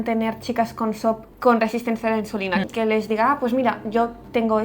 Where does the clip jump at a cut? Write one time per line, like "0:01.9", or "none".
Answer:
0:02.6